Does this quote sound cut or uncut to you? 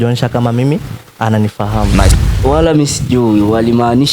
cut